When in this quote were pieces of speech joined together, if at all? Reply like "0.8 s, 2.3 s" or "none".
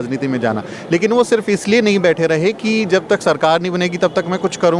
none